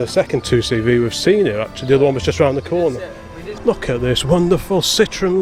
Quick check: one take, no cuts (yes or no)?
no